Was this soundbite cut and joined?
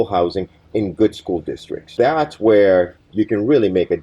yes; 2 cuts; at 1.8 s, 3.0 s

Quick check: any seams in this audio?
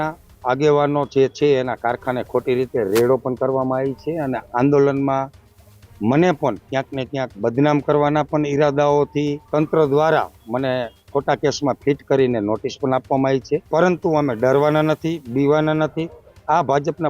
yes; 2 cuts; at 9.4 s, 13.7 s

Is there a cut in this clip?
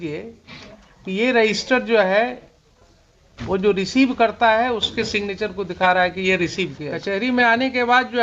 yes; 1 cut; at 6.9 s

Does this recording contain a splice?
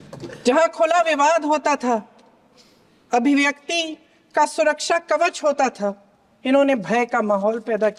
no; 0 cuts

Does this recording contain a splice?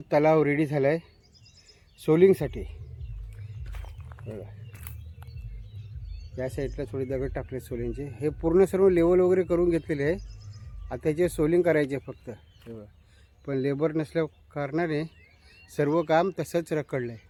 no; 0 cuts

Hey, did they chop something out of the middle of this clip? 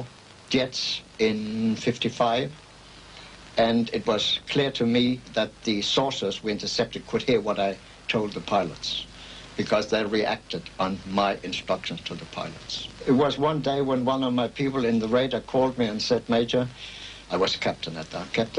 yes; 1 cut; at 9.2 s

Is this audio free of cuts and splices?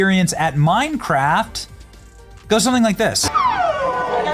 no; 1 cut; at 3.2 s

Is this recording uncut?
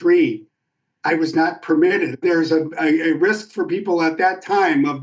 no; 1 cut; at 2.2 s

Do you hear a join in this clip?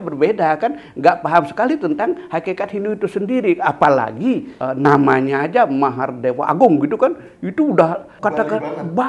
yes; 2 cuts; at 4.6 s, 8.1 s

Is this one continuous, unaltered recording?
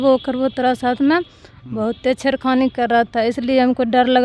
yes; 0 cuts

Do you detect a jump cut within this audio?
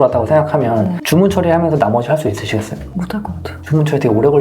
yes; 2 cuts; at 1.0 s, 3.1 s

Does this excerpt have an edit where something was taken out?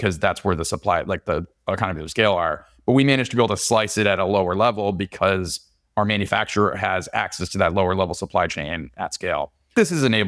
no; 0 cuts

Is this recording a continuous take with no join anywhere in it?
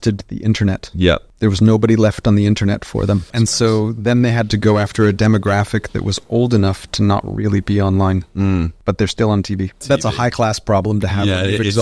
no; 5 cuts; at 1.3 s, 3.3 s, 4.5 s, 8.7 s, 9.8 s

